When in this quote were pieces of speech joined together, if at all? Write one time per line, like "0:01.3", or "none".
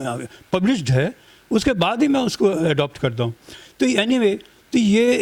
none